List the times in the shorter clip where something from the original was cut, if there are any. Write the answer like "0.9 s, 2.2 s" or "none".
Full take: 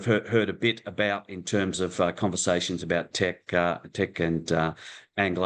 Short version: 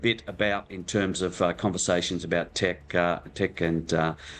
none